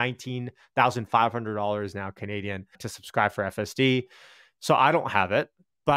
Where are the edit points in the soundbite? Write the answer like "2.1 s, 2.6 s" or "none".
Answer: 2.9 s

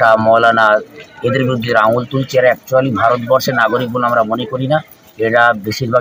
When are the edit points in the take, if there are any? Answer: none

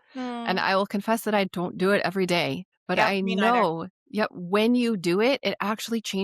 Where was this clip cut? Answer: 3.1 s

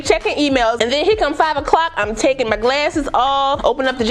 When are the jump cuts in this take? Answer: none

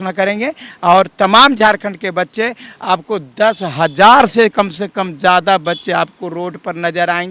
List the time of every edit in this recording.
none

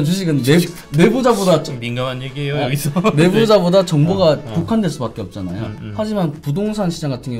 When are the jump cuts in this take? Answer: none

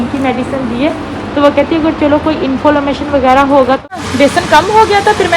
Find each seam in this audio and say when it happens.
4.0 s

